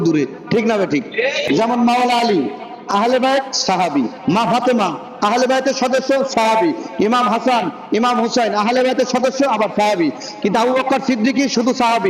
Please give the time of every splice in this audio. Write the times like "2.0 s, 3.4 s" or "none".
1.4 s

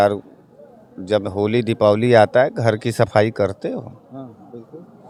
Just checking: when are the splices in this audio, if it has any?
none

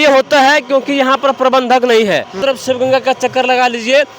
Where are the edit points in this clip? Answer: 2.4 s

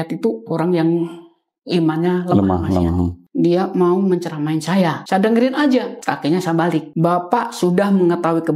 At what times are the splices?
3.2 s, 5.0 s, 5.9 s, 6.9 s

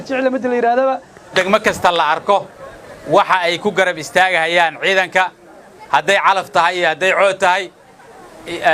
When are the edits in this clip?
1.3 s

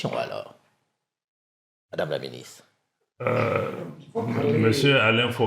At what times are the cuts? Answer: none

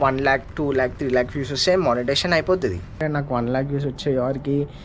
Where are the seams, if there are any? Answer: 3.0 s

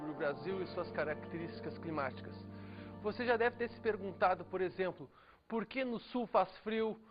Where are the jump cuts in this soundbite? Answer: 0.9 s

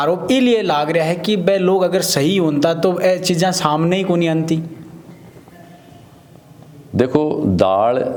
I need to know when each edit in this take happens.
none

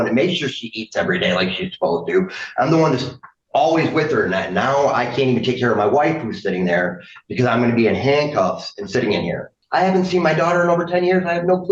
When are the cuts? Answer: 9.6 s

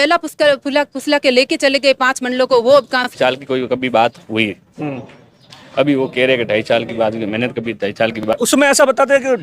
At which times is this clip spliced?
3.1 s, 8.2 s

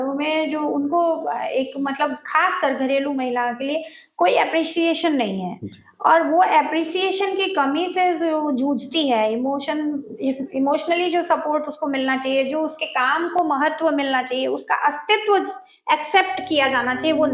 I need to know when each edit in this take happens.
none

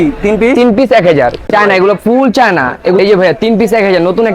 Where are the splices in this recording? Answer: 1.5 s, 3.0 s

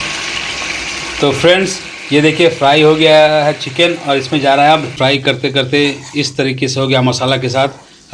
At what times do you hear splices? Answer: 4.9 s

